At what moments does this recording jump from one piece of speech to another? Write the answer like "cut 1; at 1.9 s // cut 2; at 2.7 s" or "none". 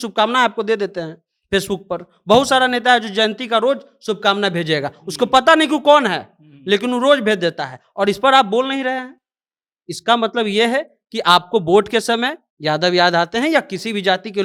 none